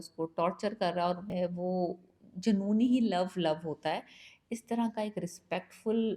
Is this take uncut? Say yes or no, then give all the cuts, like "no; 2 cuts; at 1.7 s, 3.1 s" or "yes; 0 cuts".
no; 1 cut; at 1.2 s